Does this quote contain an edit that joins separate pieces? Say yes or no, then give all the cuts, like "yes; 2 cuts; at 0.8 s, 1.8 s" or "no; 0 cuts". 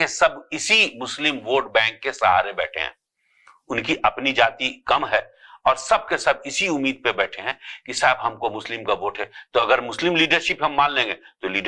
no; 0 cuts